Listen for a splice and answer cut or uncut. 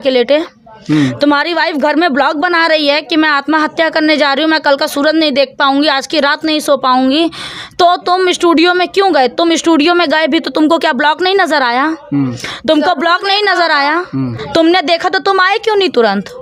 uncut